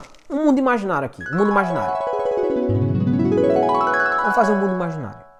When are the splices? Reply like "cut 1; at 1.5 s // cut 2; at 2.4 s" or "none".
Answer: none